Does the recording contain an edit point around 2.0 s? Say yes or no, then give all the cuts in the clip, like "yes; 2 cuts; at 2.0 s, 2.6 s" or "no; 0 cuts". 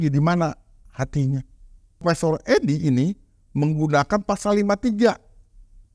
yes; 1 cut; at 2.0 s